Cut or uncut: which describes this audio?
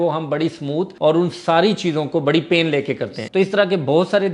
cut